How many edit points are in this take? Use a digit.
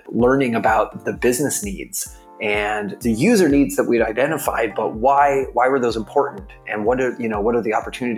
2